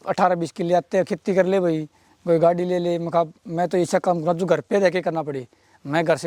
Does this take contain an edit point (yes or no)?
no